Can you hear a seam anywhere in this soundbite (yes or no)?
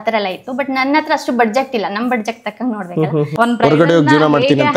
yes